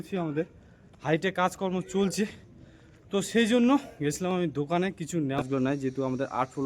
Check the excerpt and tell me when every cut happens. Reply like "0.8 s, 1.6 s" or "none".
5.4 s